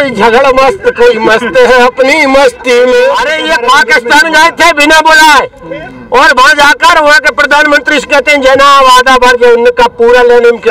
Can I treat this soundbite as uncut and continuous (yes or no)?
no